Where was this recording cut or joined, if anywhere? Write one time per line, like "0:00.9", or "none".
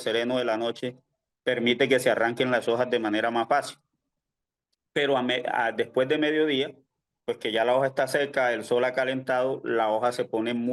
none